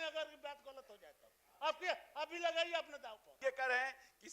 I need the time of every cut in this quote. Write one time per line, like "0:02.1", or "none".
0:03.4